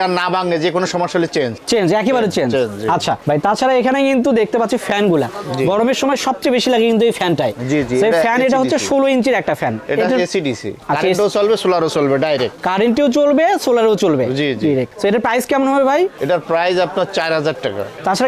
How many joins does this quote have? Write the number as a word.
zero